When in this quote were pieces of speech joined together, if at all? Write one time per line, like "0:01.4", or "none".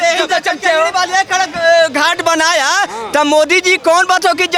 none